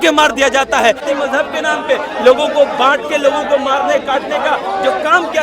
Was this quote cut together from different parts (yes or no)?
yes